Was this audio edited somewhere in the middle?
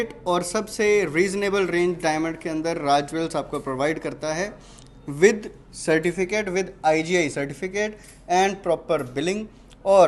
no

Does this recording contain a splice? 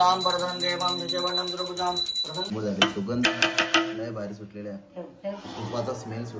yes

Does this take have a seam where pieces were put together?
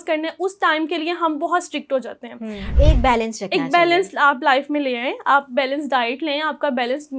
yes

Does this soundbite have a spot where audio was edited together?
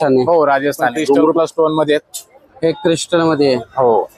yes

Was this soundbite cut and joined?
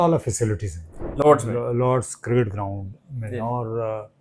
no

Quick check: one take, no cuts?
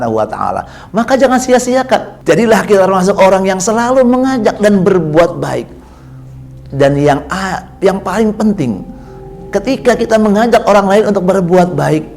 no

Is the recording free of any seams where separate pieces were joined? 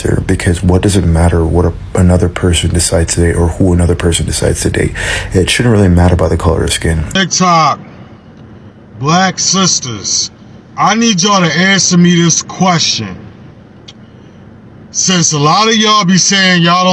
no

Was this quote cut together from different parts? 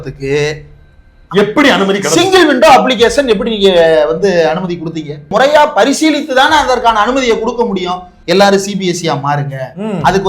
yes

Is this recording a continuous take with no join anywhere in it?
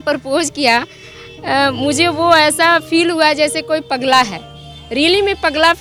yes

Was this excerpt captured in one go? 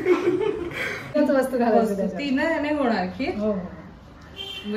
no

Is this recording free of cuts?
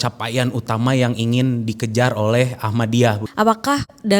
no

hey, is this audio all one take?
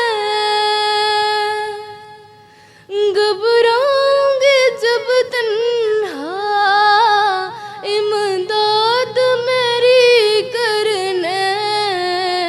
yes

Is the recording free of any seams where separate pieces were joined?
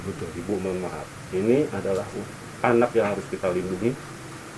no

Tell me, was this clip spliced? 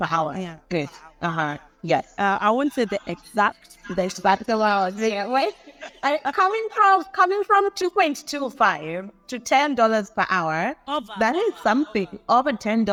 no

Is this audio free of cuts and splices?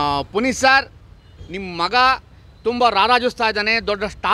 yes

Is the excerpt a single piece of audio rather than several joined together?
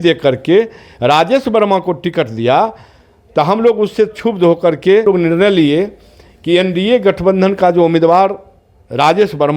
no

